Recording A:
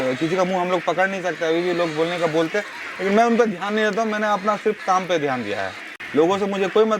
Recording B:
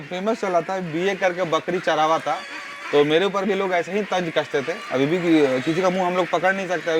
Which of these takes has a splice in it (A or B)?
A